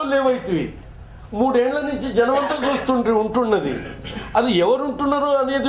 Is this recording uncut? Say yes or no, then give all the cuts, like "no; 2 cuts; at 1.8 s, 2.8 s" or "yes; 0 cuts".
yes; 0 cuts